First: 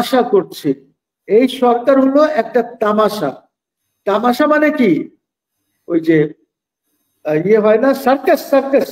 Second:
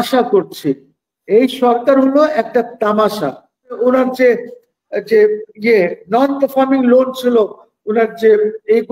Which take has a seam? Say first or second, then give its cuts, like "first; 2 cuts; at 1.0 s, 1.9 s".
second; 1 cut; at 3.8 s